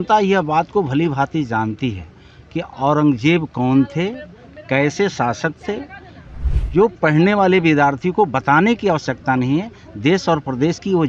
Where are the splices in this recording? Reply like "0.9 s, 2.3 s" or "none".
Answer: none